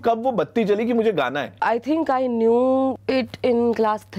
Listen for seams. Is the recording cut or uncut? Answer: cut